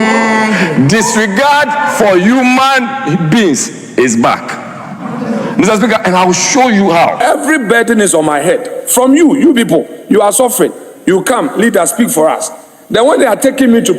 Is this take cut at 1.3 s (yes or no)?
no